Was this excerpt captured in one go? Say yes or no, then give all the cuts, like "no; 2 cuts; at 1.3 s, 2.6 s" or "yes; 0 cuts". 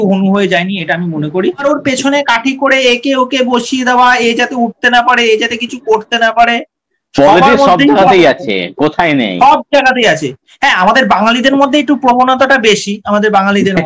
no; 1 cut; at 1.6 s